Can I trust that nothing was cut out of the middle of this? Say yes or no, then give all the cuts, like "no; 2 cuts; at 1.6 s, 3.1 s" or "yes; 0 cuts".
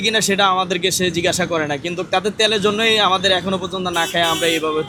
yes; 0 cuts